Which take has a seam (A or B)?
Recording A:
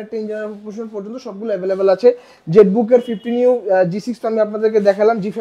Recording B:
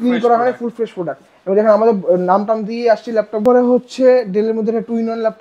B